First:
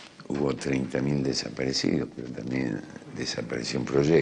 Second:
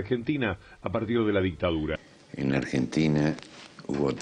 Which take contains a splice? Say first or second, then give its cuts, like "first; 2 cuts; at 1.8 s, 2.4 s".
second; 1 cut; at 2.1 s